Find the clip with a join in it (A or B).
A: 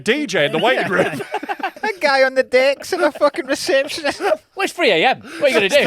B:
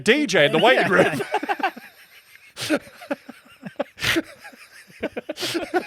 A